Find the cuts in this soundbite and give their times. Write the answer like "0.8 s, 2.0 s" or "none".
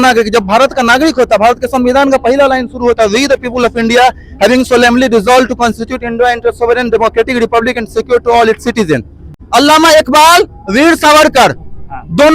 9.4 s